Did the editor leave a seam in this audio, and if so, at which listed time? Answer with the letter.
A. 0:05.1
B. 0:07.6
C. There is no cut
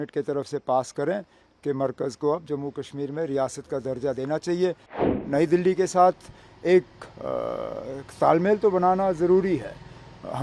A